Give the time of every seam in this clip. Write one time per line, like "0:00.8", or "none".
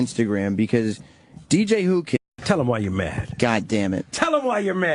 none